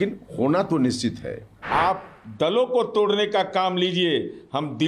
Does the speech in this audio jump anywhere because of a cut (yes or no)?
yes